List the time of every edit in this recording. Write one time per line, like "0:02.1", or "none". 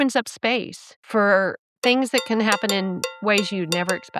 0:01.0
0:01.7
0:03.1